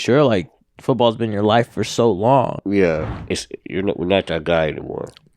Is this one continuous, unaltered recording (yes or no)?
no